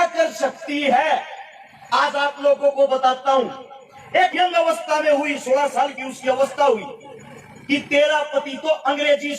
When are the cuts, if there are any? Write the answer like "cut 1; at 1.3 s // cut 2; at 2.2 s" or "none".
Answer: cut 1; at 4.3 s